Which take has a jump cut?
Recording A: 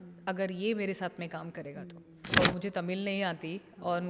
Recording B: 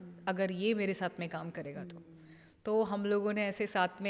A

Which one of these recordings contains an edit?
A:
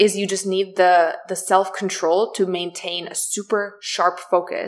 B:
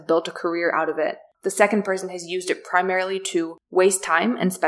B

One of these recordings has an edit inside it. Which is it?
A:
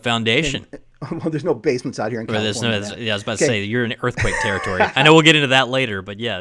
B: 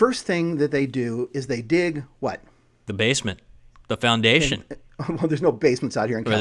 B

